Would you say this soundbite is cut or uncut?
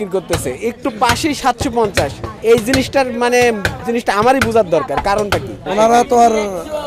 cut